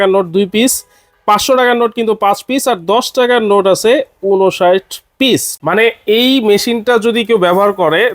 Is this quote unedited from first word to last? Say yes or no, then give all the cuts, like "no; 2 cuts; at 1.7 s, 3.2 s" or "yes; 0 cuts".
no; 1 cut; at 5.5 s